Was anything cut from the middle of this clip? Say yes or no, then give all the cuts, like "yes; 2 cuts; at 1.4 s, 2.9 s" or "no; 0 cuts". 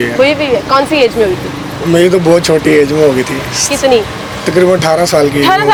no; 0 cuts